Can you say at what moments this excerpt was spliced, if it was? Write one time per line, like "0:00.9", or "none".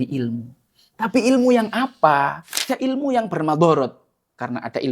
0:02.7